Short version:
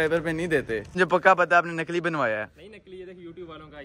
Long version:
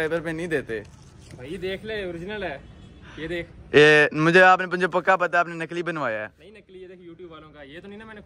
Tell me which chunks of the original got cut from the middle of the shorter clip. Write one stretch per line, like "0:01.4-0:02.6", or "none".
0:00.9-0:04.7